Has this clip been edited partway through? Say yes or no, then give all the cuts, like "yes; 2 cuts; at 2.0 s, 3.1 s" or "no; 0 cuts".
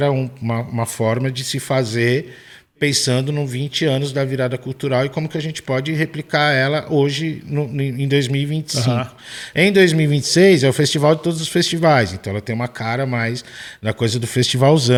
no; 0 cuts